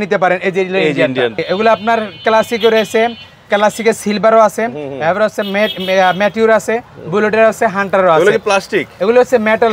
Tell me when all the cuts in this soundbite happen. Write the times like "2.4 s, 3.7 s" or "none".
1.4 s

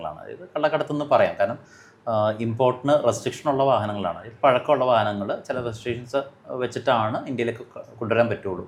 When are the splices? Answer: none

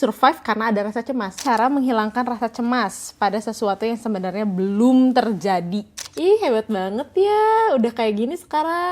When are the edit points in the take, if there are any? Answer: 1.4 s, 6.0 s

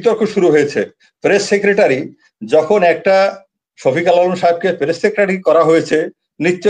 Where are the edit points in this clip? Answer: none

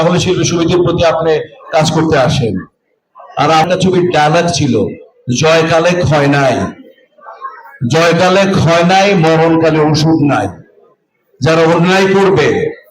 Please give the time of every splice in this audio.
3.6 s

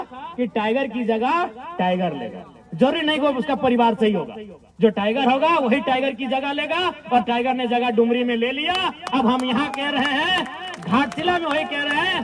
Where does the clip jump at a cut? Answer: none

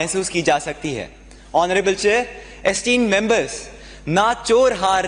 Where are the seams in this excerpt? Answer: none

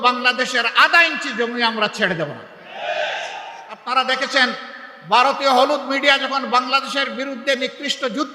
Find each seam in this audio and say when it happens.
3.8 s

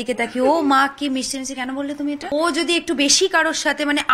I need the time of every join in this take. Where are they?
2.3 s

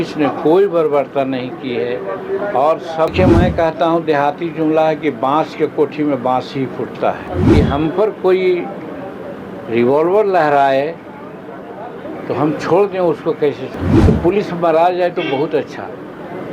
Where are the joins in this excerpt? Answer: 3.1 s, 7.3 s, 13.7 s

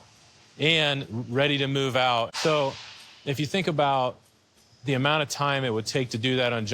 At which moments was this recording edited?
2.3 s

